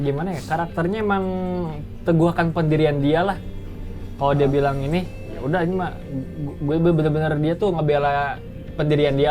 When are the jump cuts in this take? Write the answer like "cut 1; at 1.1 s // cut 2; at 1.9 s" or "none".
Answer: none